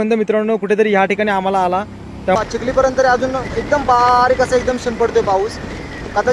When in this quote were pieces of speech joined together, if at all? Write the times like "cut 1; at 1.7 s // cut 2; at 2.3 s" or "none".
cut 1; at 2.4 s